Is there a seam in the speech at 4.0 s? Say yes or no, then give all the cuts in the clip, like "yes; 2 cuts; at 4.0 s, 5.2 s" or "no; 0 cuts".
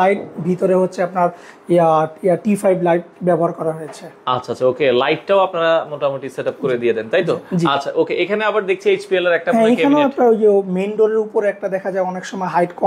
no; 0 cuts